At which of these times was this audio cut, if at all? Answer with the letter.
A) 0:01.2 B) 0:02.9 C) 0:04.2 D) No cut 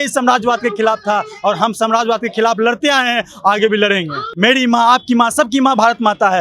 C